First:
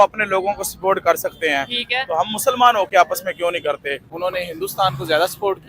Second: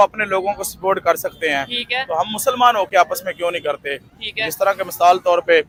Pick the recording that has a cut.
first; 1 cut; at 4.0 s

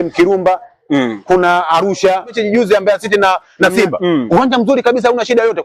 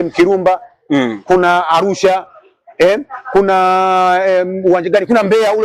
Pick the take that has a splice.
first; 1 cut; at 2.3 s

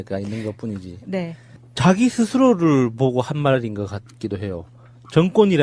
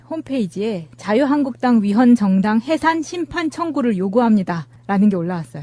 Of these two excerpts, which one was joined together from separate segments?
first; 1 cut; at 4.1 s

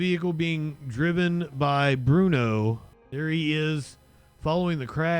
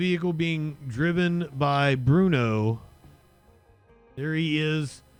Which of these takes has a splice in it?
first; 1 cut; at 2.9 s

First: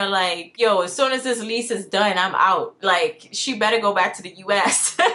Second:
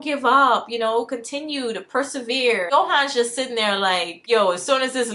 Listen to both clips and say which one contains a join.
second; 1 cut; at 2.7 s

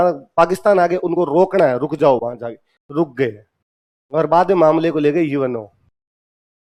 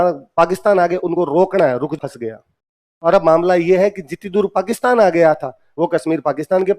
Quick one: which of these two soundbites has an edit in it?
second; 1 cut; at 2.0 s

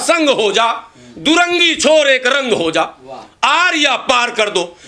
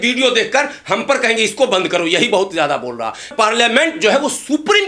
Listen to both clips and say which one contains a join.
second; 1 cut; at 3.3 s

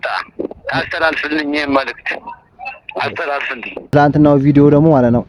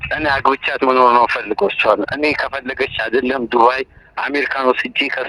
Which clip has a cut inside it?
first; 1 cut; at 3.9 s

